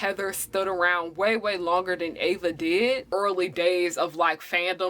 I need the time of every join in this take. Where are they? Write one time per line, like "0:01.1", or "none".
0:03.1